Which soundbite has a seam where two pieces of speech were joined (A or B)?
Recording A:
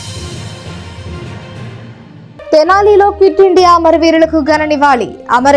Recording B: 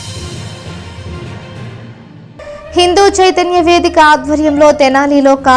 B